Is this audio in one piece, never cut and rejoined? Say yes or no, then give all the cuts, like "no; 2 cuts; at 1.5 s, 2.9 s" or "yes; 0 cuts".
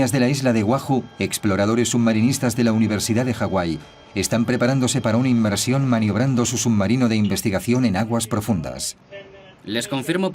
no; 1 cut; at 1.1 s